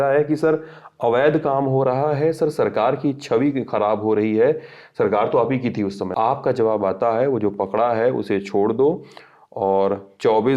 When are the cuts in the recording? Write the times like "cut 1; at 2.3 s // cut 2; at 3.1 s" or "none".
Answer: cut 1; at 6.0 s